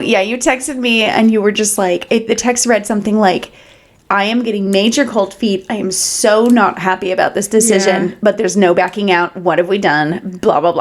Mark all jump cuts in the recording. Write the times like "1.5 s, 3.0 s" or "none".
none